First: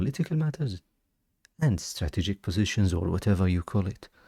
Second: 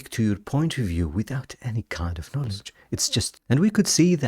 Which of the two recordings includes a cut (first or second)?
second